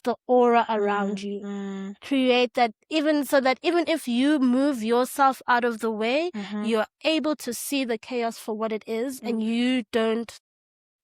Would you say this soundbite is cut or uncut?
uncut